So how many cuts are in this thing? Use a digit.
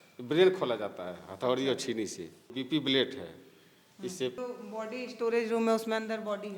2